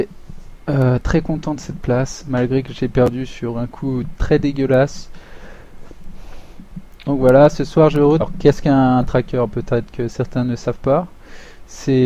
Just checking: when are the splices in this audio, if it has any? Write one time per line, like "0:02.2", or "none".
none